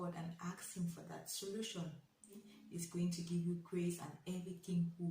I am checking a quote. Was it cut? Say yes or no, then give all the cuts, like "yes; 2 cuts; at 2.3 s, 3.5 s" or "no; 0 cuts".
yes; 1 cut; at 2.4 s